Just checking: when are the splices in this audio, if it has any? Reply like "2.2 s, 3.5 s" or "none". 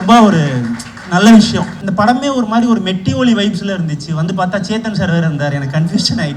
1.8 s